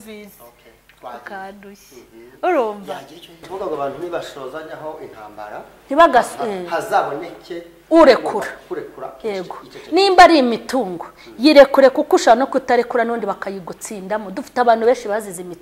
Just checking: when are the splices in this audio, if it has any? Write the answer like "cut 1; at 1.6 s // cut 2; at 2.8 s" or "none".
cut 1; at 3.5 s